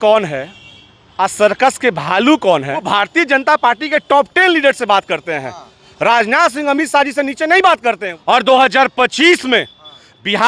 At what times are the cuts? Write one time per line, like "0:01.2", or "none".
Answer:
0:02.8
0:08.1